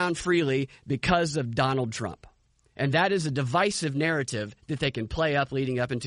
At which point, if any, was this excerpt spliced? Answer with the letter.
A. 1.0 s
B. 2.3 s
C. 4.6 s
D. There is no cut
D